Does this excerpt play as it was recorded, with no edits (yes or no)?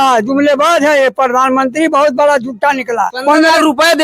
no